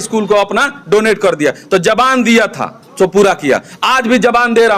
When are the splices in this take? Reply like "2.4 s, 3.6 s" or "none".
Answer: none